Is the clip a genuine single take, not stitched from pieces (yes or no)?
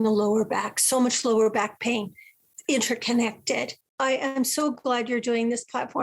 no